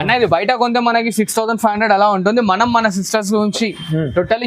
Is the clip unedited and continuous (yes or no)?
yes